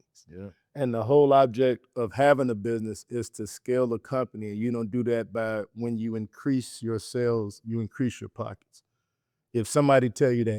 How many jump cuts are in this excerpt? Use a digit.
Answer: 0